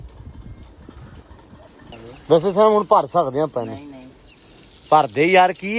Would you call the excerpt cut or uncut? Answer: cut